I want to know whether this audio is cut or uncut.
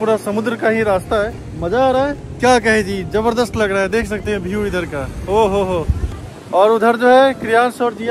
uncut